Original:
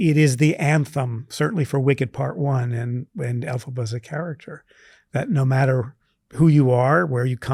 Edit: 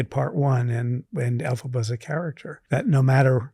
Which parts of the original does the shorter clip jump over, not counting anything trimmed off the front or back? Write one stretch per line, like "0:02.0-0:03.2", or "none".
0:04.5-0:04.9